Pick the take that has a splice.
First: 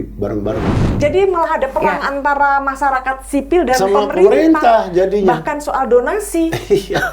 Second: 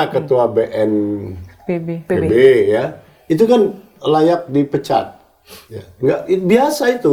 first; 1 cut; at 1.0 s

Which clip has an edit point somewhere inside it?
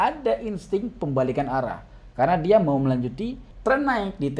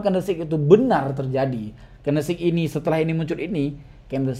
first; 1 cut; at 3.4 s

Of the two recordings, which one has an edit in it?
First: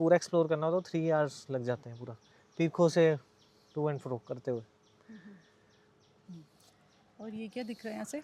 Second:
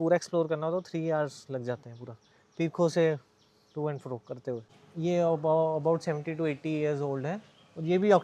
second; 1 cut; at 4.8 s

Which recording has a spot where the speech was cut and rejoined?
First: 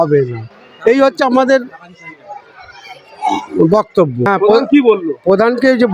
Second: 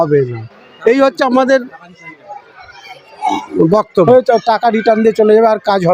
second; 1 cut; at 4.1 s

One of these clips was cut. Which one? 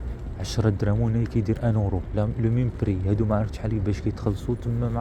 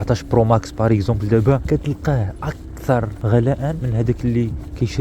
second; 2 cuts; at 1.6 s, 3.6 s

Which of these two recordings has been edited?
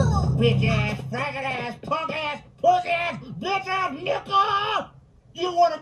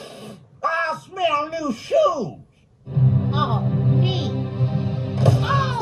second; 1 cut; at 4.6 s

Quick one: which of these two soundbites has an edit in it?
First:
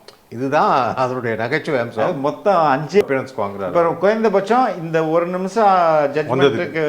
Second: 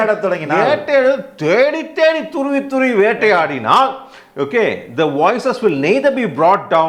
first; 1 cut; at 3.0 s

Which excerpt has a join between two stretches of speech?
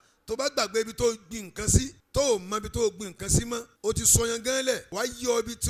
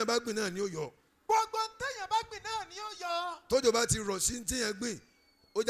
first; 3 cuts; at 2.0 s, 3.7 s, 4.9 s

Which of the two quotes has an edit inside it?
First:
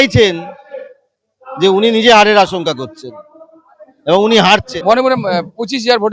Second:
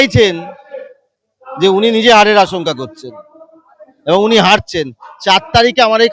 first; 1 cut; at 4.7 s

